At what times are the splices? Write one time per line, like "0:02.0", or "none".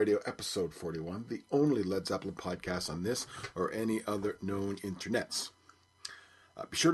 none